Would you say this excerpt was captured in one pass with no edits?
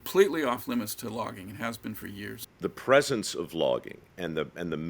no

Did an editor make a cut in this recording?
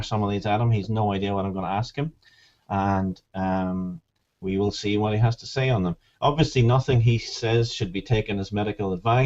yes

